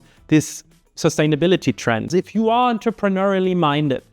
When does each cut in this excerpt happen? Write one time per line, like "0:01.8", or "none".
0:02.1